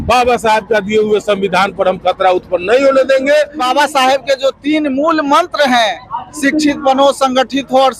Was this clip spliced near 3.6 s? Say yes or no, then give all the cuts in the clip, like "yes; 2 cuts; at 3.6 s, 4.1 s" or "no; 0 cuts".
yes; 1 cut; at 3.6 s